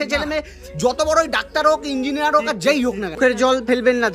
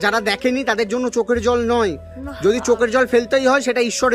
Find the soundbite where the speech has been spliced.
first; 1 cut; at 3.2 s

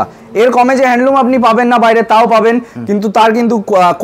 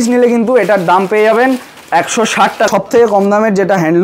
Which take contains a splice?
second; 1 cut; at 2.7 s

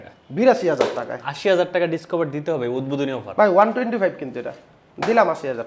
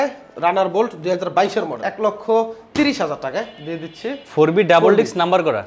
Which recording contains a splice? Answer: second; 1 cut; at 1.8 s

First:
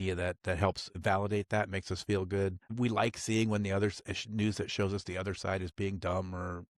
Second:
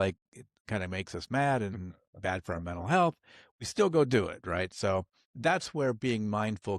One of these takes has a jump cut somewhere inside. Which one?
first; 2 cuts; at 0.9 s, 2.6 s

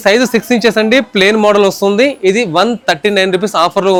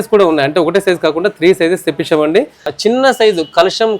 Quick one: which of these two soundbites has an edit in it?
second; 1 cut; at 2.6 s

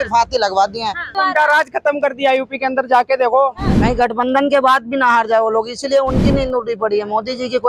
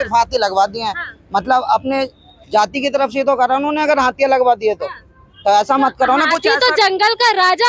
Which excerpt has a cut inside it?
first; 2 cuts; at 1.1 s, 3.7 s

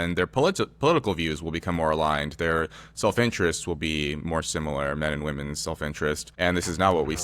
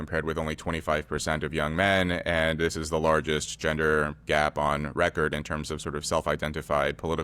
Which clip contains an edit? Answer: first; 1 cut; at 6.3 s

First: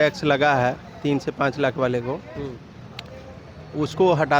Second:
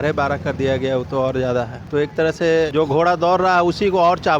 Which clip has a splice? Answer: second; 2 cuts; at 1.8 s, 2.7 s

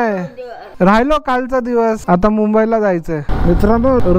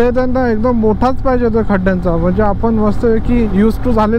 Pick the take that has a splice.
first; 2 cuts; at 2.0 s, 3.3 s

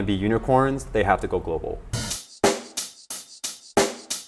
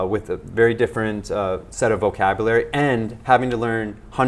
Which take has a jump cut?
first; 1 cut; at 2.1 s

